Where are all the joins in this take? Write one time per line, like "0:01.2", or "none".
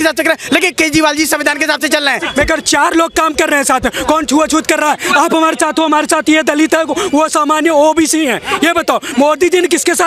0:02.2